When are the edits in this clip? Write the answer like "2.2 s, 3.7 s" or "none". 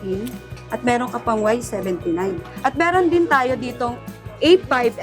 2.5 s